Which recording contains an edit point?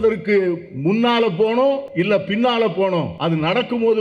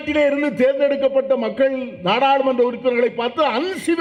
first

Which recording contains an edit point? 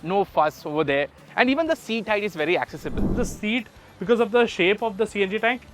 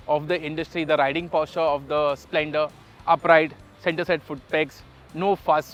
first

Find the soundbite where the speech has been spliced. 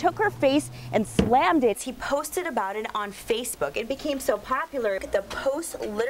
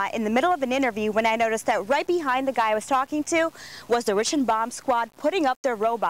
first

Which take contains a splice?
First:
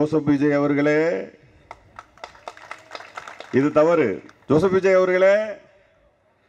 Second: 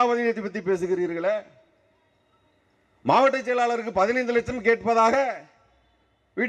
first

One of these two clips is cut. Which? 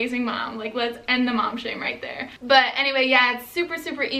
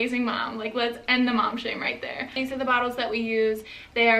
second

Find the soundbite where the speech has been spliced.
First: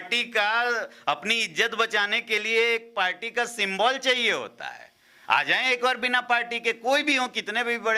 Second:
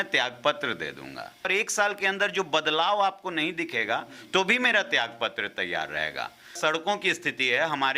second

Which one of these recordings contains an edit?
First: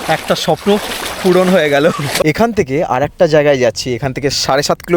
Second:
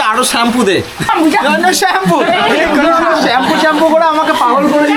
first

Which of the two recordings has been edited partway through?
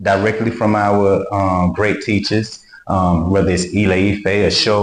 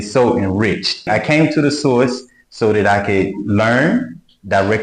second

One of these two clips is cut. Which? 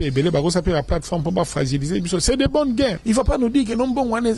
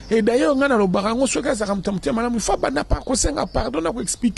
first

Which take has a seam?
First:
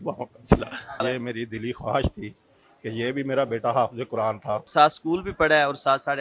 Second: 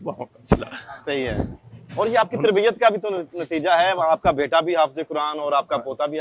first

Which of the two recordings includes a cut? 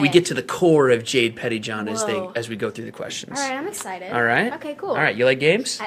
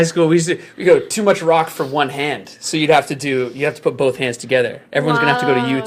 second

